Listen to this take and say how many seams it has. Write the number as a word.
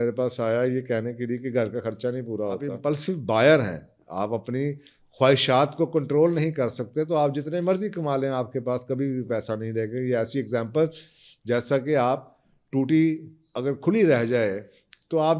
one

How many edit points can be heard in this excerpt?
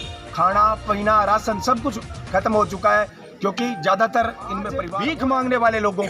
one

